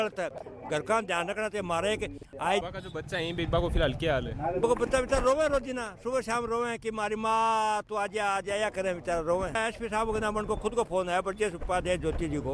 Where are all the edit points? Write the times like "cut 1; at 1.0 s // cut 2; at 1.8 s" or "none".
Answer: cut 1; at 2.6 s // cut 2; at 9.6 s